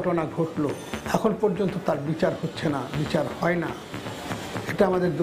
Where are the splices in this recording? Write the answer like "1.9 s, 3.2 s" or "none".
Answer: 0.9 s